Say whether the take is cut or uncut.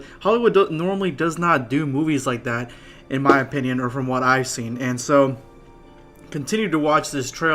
uncut